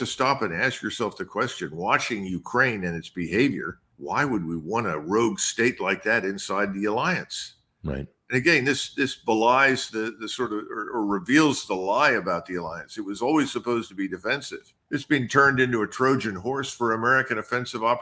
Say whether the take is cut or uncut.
uncut